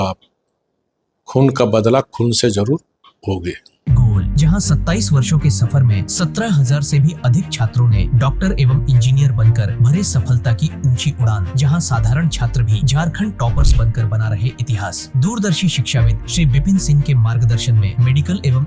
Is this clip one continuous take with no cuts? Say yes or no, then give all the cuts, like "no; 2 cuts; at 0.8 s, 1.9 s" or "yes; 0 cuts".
yes; 0 cuts